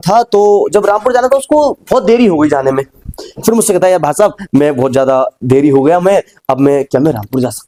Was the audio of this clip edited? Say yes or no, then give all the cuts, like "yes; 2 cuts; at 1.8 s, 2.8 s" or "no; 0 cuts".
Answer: no; 0 cuts